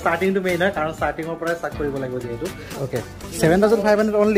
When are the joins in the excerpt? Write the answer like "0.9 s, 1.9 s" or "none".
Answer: 2.6 s